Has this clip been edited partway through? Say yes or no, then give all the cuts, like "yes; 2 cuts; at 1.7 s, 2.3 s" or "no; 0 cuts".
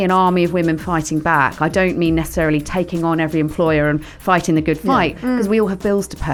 no; 0 cuts